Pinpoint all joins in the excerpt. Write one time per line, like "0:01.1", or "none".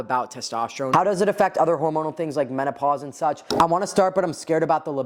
0:00.9
0:03.4